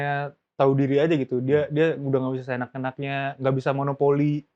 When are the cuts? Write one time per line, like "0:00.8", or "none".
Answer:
none